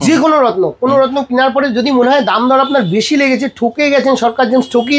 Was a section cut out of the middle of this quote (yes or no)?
no